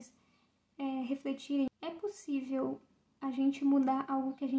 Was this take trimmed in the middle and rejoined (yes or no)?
yes